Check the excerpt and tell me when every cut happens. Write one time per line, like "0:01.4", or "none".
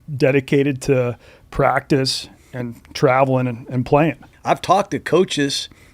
0:04.3